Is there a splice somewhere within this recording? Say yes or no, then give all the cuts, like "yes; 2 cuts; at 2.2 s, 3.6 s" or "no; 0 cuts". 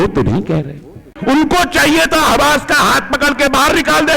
yes; 1 cut; at 1.1 s